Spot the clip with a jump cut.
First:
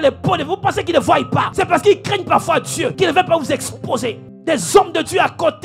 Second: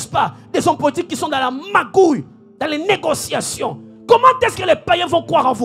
first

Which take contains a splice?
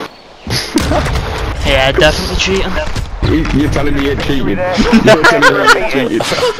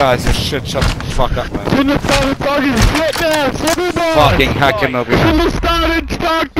first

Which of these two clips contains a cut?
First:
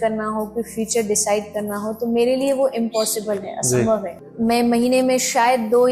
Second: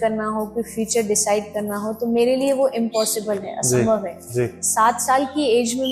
first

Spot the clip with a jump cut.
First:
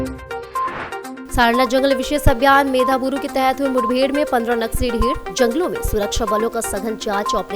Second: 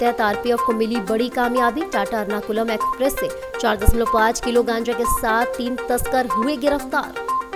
first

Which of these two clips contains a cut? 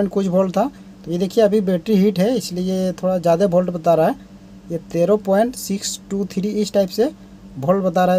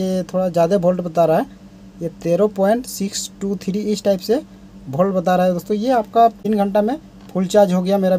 second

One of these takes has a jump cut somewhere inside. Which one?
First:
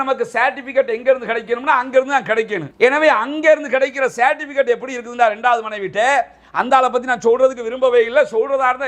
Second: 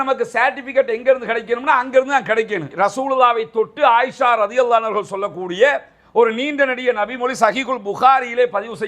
second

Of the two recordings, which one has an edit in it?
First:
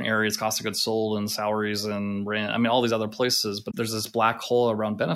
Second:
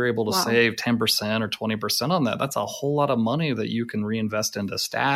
first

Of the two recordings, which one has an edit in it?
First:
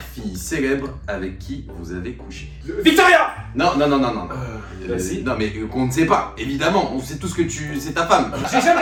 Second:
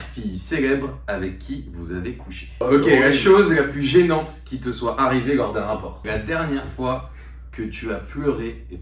second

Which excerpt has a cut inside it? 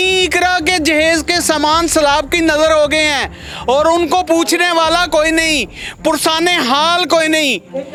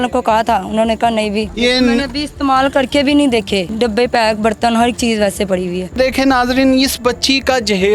second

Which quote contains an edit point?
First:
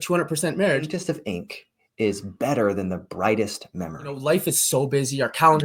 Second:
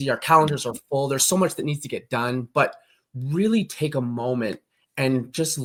first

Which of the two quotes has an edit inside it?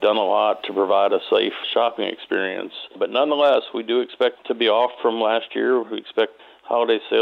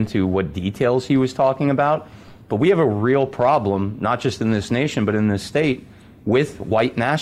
first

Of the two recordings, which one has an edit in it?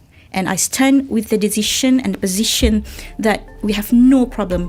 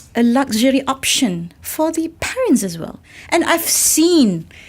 second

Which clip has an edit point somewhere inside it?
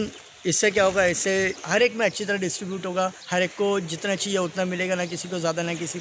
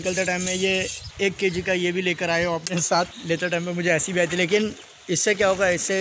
second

